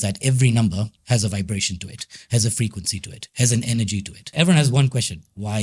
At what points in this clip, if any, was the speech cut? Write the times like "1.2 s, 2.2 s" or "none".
1.0 s, 4.3 s